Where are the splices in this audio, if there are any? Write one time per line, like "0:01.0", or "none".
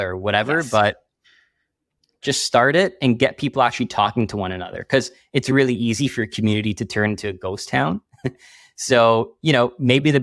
none